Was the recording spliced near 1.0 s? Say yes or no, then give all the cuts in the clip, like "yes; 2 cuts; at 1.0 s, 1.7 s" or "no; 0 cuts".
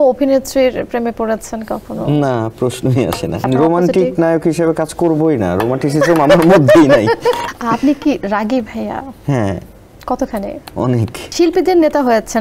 no; 3 cuts; at 3.5 s, 7.5 s, 11.2 s